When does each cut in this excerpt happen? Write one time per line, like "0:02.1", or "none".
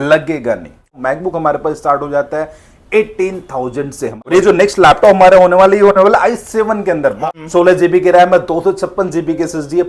0:01.0
0:04.3
0:07.2